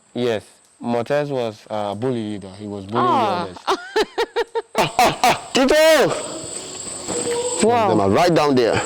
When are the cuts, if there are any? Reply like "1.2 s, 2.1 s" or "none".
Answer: 4.8 s, 5.4 s, 7.0 s